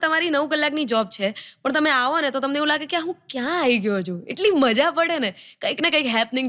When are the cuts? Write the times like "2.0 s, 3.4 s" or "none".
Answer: none